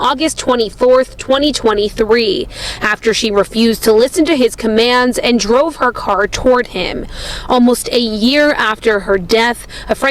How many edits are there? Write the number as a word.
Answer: one